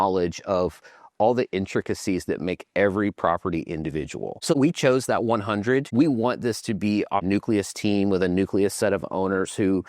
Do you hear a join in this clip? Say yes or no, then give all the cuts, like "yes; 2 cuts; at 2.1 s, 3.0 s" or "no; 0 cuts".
yes; 3 cuts; at 4.5 s, 5.9 s, 7.2 s